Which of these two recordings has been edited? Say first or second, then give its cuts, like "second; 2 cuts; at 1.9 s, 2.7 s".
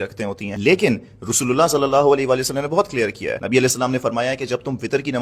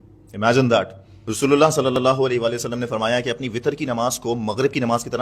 second; 1 cut; at 1.3 s